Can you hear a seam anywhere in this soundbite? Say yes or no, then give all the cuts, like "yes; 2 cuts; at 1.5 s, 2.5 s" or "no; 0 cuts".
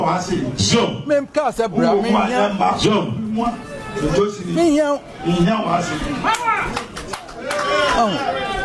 no; 0 cuts